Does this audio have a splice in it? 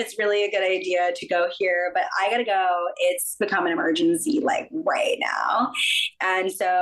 no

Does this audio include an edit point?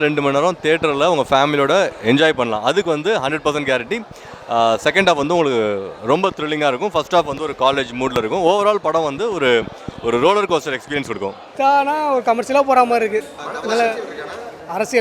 yes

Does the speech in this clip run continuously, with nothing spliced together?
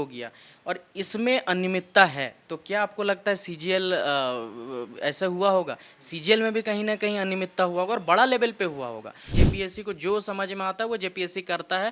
no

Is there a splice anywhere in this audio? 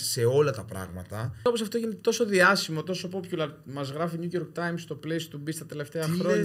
yes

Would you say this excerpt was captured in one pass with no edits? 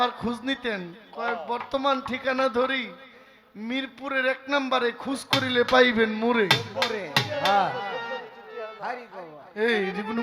yes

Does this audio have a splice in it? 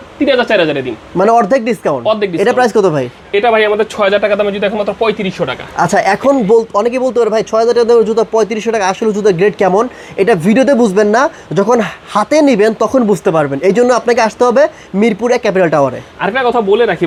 no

